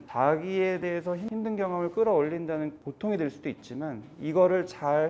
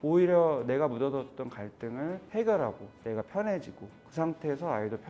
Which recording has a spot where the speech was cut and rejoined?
first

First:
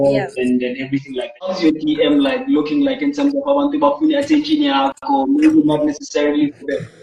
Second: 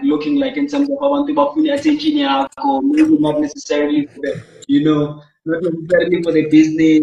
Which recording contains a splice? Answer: first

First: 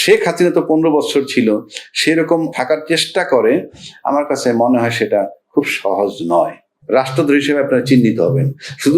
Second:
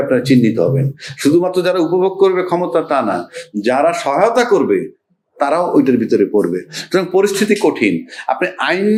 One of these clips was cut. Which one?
first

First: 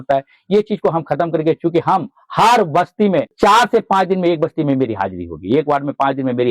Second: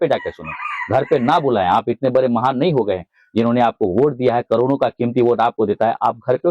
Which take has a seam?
first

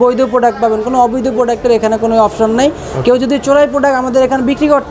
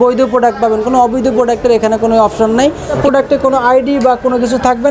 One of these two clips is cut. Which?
second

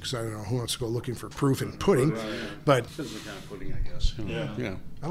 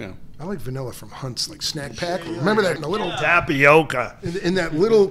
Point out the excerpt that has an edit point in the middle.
first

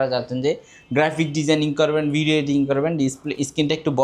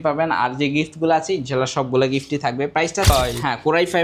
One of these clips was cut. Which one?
second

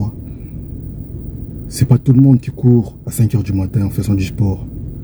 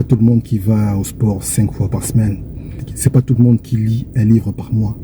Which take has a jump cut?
second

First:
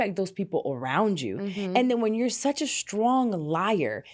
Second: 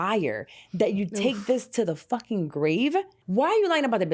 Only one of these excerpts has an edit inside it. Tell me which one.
second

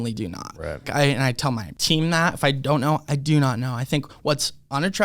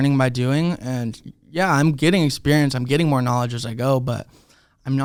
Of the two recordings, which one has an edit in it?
first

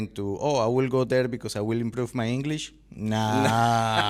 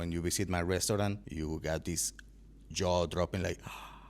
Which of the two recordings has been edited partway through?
second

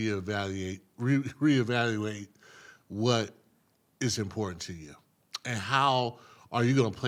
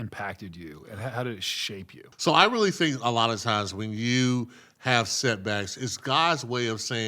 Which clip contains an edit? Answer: second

